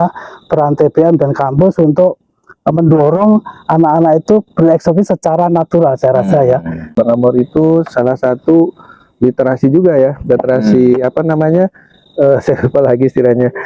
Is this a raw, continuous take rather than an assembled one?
no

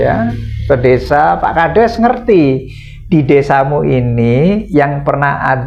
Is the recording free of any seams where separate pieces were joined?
yes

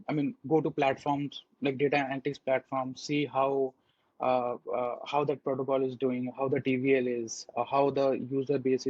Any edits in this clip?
no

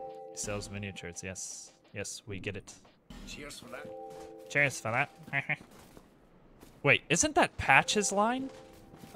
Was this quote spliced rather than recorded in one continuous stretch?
no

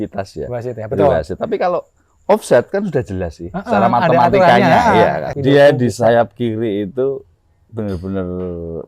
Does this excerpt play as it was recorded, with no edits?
no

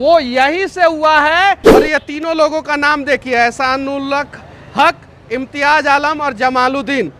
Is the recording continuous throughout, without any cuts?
no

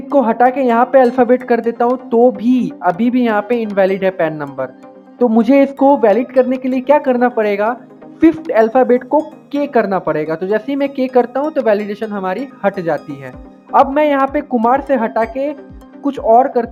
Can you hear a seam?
no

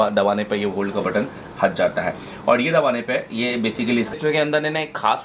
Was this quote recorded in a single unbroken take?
yes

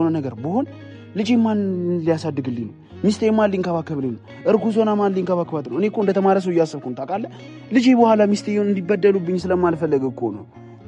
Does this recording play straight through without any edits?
yes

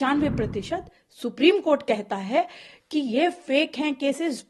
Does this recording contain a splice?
no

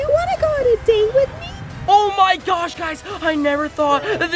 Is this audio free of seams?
yes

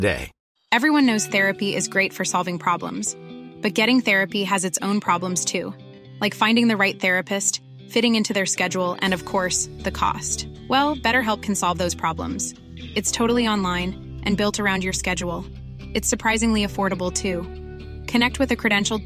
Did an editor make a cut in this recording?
no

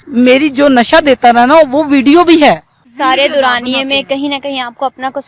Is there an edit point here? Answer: yes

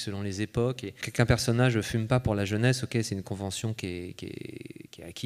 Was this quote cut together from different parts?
yes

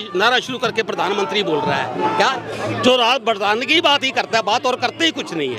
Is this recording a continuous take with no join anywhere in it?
no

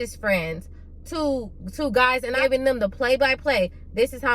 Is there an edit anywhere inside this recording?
yes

